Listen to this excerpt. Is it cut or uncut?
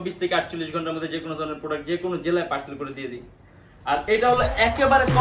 uncut